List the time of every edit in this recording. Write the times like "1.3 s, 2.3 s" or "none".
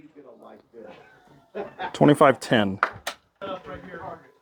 3.4 s